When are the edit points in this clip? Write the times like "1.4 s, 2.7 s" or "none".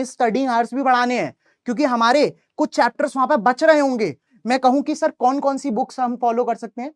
4.3 s

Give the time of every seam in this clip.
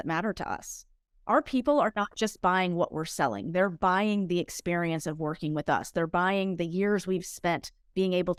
none

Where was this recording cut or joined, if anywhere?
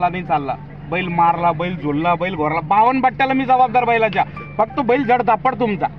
none

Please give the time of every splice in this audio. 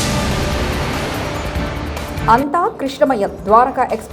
2.2 s

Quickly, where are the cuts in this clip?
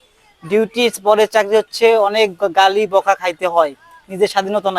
none

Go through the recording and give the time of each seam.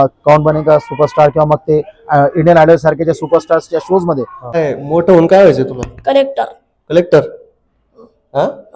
4.3 s

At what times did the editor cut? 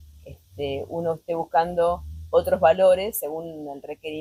none

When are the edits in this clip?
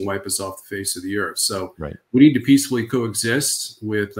none

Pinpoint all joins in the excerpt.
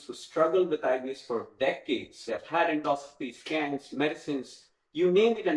2.2 s

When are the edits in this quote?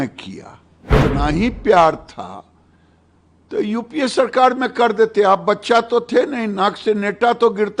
1.0 s

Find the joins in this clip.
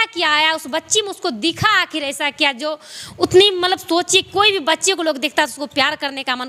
none

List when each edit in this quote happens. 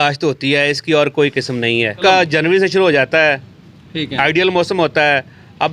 2.0 s

